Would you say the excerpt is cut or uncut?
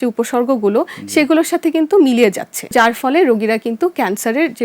cut